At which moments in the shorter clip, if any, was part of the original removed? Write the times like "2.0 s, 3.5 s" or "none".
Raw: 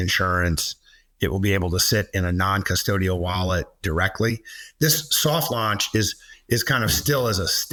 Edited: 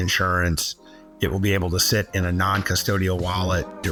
none

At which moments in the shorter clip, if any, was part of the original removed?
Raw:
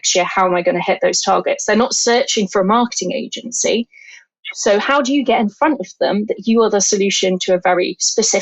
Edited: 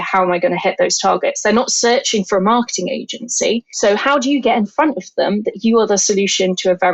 3.7 s

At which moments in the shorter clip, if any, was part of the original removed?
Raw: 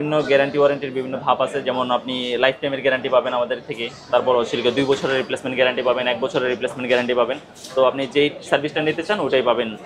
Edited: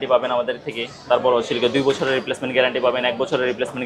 none

